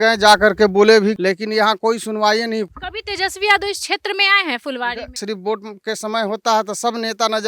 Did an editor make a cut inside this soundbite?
yes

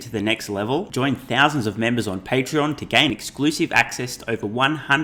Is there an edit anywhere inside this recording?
no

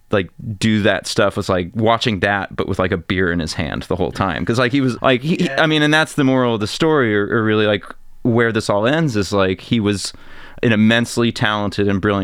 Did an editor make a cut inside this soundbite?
yes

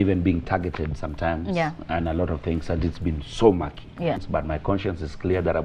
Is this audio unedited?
no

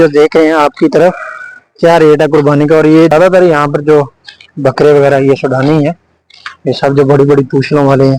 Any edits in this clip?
yes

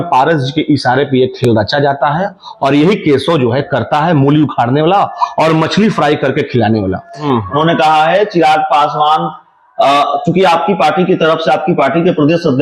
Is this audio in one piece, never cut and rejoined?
no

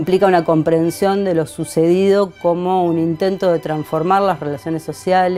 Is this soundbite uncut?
yes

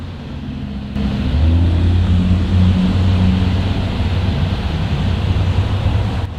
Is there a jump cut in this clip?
no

